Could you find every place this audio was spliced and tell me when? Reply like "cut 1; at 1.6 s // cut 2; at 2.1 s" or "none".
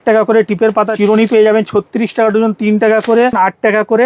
cut 1; at 0.9 s // cut 2; at 3.3 s